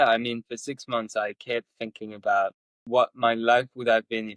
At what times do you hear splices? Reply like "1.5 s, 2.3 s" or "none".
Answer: 2.7 s